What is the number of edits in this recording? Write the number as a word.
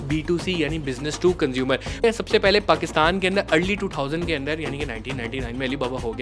one